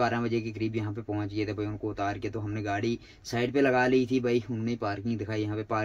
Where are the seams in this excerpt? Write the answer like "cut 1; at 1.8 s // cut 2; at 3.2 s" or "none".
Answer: none